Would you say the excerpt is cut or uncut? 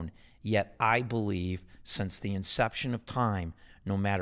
uncut